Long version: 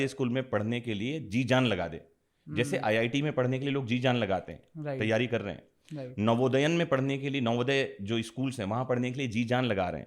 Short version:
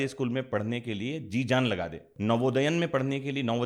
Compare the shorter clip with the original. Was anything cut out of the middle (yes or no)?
yes